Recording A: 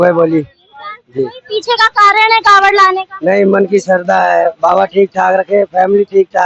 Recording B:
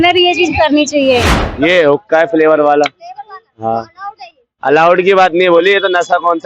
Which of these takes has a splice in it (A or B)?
B